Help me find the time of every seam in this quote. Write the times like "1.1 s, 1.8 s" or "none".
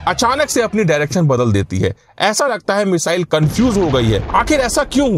4.2 s